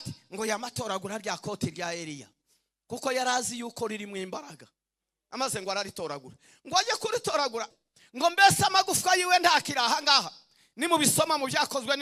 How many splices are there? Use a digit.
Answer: 1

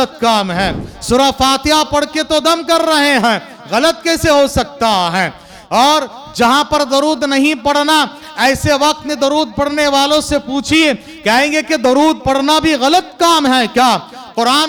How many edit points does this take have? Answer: 0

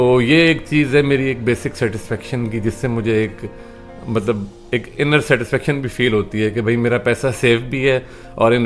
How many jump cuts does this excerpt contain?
0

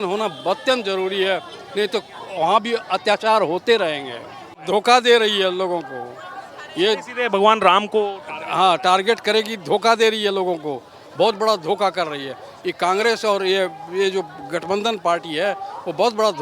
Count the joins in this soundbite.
1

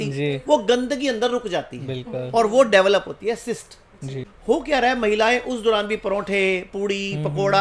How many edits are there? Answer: 1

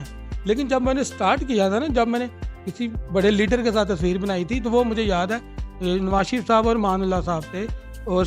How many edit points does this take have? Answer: 0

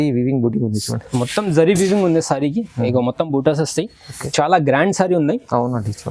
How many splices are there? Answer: 1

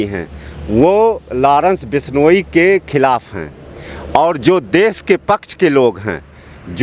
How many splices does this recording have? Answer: 0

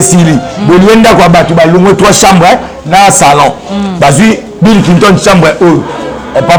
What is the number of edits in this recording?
0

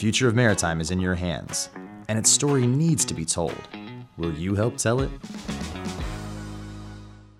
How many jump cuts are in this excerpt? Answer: 0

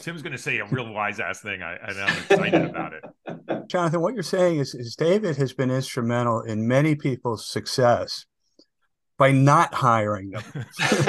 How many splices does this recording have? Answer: 1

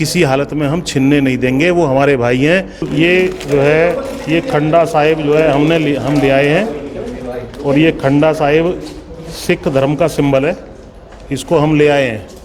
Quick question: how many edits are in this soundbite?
1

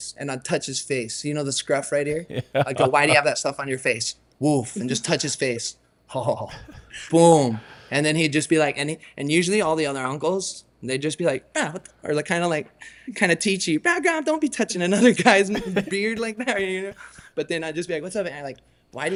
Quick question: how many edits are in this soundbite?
0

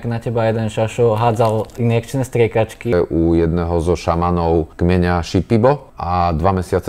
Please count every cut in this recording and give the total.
3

